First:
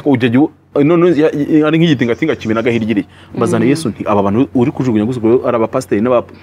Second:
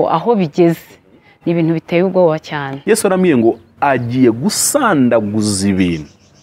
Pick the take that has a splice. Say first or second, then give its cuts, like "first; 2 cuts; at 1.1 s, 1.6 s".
second; 1 cut; at 2.7 s